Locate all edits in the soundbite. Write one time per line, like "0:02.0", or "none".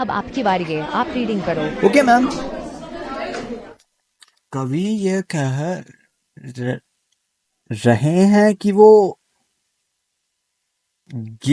none